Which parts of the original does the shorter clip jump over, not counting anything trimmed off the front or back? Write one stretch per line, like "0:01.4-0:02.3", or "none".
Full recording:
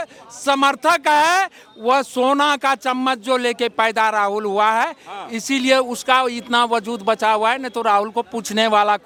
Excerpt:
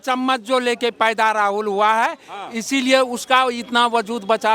none